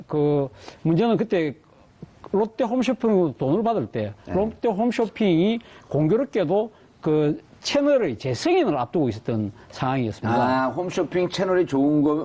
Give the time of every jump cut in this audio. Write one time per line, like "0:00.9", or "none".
none